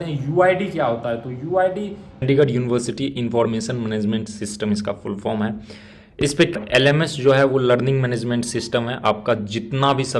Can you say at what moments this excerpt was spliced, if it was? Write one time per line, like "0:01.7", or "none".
0:02.2
0:06.5